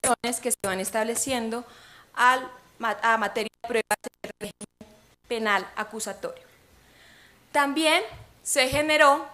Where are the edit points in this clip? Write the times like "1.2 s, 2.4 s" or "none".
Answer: 4.6 s